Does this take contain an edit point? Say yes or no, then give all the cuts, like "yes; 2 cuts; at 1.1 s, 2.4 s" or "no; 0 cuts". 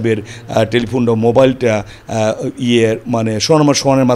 no; 0 cuts